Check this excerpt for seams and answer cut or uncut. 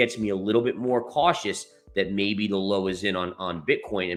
uncut